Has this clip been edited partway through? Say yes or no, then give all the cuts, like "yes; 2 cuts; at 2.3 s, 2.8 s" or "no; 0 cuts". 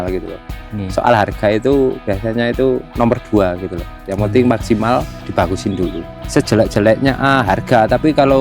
yes; 1 cut; at 6.1 s